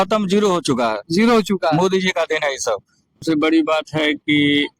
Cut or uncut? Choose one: cut